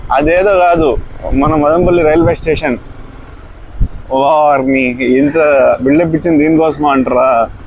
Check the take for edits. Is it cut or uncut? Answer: uncut